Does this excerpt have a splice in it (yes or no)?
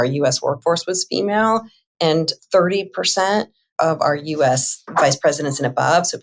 no